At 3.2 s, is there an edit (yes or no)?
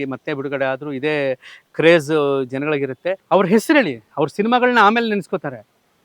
yes